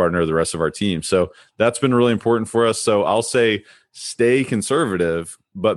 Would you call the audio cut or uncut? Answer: uncut